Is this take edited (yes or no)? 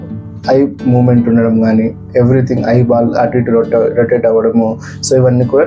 no